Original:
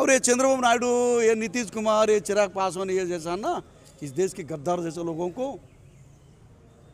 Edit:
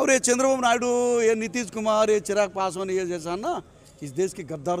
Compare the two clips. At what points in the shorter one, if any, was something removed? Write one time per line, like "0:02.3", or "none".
none